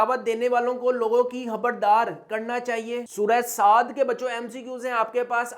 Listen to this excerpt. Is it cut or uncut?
cut